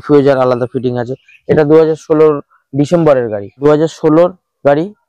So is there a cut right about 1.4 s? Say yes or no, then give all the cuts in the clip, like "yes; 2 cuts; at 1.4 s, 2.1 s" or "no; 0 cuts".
no; 1 cut; at 3.4 s